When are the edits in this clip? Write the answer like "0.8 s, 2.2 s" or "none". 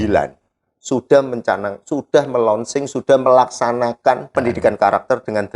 4.3 s